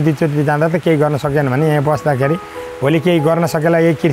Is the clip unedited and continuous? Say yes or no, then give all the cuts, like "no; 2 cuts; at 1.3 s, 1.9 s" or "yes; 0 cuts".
yes; 0 cuts